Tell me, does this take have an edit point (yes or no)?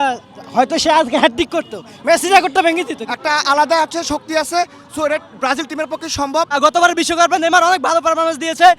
yes